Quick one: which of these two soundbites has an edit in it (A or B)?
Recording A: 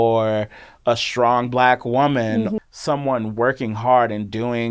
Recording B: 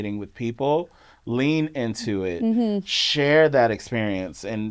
A